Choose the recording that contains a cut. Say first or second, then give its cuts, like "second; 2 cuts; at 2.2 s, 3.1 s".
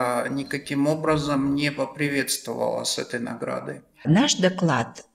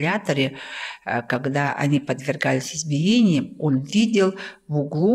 first; 1 cut; at 4.1 s